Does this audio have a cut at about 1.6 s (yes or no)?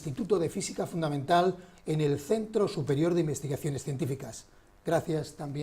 yes